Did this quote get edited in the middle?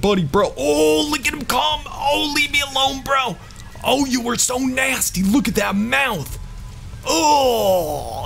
no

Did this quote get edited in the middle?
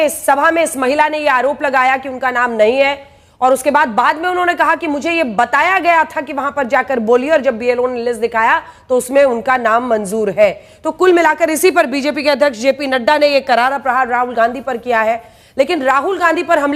no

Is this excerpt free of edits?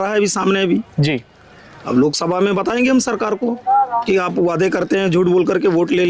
yes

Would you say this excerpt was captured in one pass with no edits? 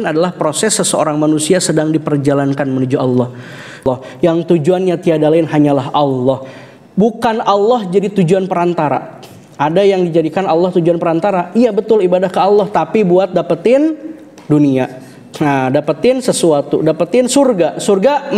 no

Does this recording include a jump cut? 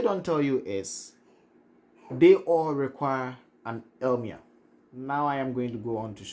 yes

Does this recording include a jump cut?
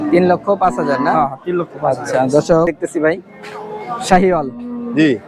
yes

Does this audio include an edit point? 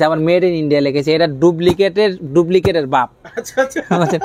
no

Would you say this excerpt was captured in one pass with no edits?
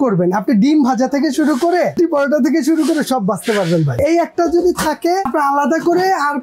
no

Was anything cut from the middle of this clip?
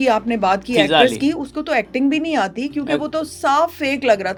no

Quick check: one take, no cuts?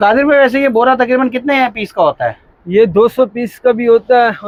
yes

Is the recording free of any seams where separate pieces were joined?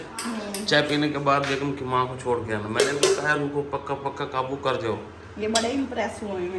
yes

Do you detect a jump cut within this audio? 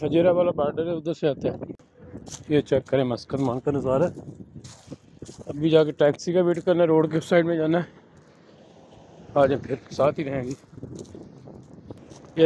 yes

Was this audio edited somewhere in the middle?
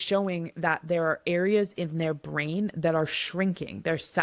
no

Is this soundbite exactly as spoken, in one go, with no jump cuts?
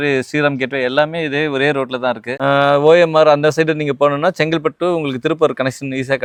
yes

